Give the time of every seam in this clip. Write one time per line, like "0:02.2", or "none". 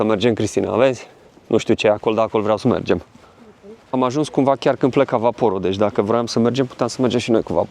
0:03.8